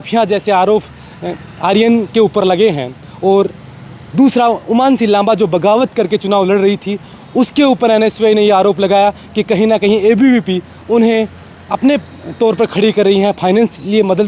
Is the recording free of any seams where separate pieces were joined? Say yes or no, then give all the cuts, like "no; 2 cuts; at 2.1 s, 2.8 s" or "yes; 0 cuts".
yes; 0 cuts